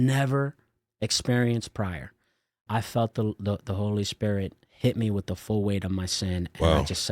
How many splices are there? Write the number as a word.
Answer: one